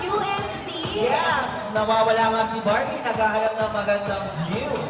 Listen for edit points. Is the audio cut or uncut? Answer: uncut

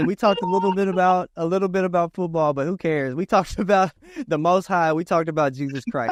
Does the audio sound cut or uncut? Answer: uncut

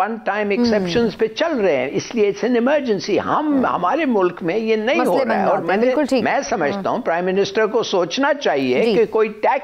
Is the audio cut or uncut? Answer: uncut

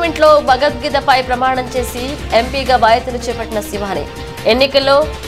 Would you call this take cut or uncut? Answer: uncut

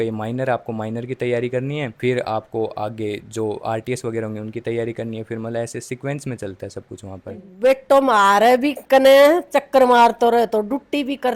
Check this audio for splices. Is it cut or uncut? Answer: cut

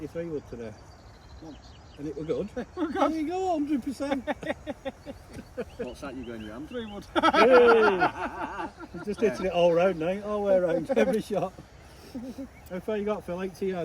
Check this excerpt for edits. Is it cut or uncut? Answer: uncut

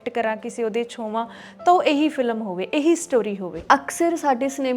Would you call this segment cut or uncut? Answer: cut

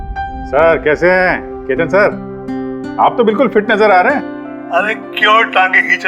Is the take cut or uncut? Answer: uncut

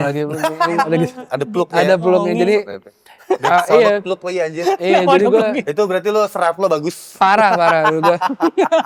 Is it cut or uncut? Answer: uncut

